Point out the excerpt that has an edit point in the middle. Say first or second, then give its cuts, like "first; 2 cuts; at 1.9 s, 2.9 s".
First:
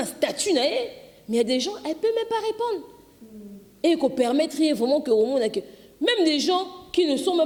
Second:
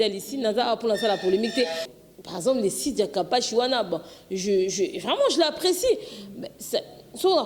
second; 1 cut; at 1.9 s